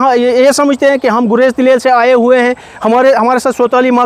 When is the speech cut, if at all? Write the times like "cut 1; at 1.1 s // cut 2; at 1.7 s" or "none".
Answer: none